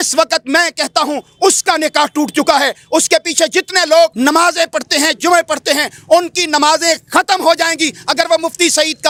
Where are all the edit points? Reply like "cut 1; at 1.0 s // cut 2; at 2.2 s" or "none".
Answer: none